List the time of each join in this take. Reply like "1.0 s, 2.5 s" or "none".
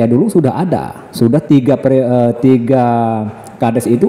none